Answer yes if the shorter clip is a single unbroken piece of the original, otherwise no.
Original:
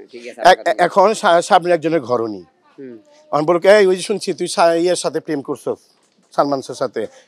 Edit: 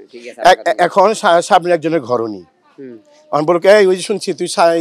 yes